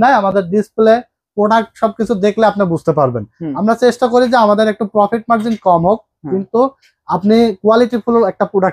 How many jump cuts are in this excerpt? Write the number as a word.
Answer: zero